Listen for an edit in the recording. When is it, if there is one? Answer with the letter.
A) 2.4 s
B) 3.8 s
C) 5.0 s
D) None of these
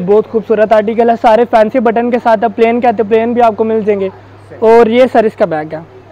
D